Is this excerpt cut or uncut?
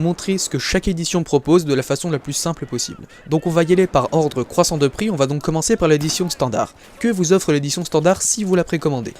uncut